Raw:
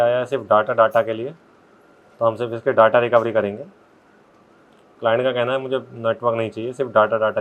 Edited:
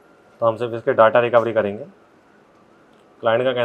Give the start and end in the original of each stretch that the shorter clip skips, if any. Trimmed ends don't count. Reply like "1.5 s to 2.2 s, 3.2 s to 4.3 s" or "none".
none